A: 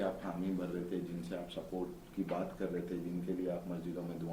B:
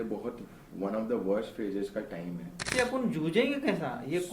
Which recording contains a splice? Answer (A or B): B